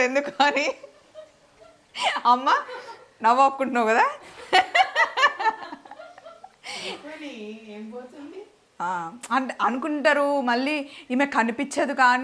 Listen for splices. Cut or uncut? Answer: uncut